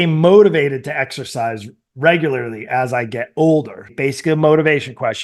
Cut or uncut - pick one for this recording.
uncut